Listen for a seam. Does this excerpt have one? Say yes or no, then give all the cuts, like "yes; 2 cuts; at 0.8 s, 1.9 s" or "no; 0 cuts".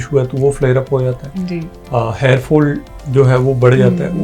no; 0 cuts